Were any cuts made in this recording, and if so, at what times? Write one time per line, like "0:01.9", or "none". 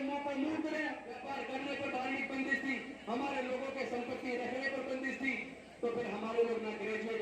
0:01.2